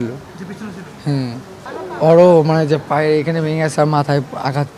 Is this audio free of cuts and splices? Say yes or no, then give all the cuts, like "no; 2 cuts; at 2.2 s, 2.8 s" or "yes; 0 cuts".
yes; 0 cuts